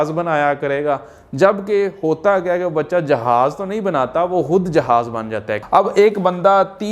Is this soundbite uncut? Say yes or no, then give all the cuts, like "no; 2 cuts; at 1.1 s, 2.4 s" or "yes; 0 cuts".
no; 1 cut; at 5.6 s